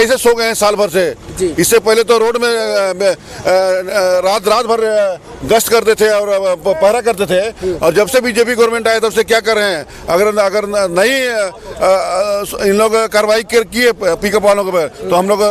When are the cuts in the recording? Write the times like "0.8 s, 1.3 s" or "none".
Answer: none